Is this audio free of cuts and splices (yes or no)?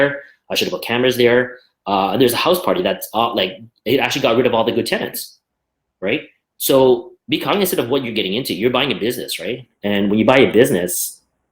yes